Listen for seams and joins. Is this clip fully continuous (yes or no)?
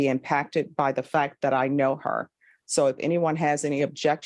yes